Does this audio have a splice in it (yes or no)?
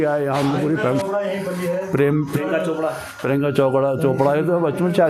yes